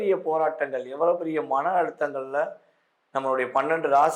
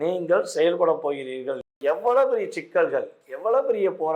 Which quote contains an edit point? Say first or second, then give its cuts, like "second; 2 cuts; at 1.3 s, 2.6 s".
second; 1 cut; at 1.8 s